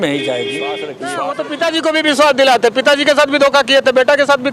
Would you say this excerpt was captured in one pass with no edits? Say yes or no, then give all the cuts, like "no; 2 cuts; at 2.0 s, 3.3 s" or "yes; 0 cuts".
no; 1 cut; at 1.0 s